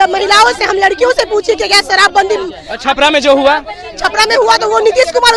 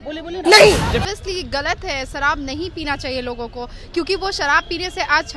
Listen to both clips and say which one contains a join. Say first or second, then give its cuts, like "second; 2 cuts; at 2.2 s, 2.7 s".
second; 1 cut; at 1.0 s